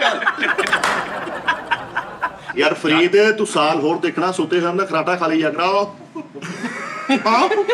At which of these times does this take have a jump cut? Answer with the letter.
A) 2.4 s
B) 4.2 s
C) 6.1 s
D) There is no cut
A